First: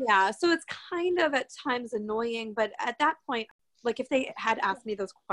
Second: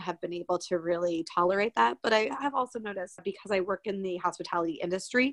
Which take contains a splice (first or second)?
first